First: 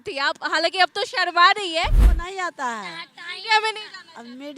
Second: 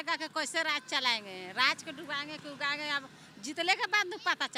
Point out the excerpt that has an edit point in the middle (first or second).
first